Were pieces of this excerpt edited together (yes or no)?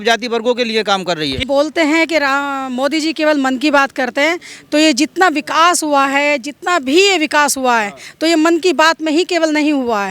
yes